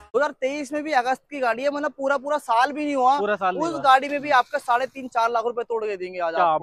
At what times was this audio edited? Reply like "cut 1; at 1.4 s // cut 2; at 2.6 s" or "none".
none